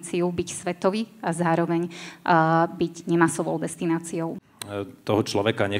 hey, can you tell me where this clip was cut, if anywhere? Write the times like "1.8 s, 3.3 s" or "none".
4.5 s